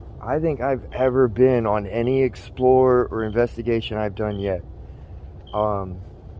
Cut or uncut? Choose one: uncut